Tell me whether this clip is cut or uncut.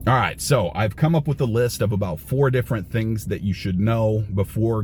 uncut